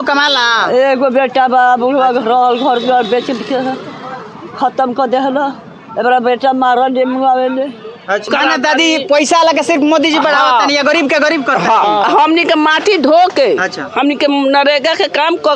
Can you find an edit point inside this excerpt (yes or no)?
yes